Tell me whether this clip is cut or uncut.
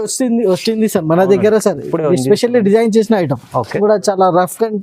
cut